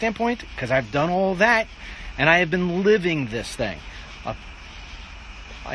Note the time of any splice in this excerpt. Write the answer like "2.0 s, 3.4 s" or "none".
none